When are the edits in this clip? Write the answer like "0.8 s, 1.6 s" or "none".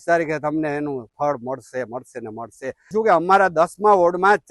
2.9 s